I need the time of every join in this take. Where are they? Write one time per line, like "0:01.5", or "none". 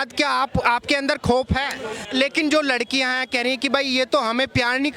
0:02.0

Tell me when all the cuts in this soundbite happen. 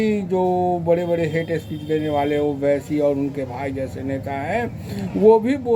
none

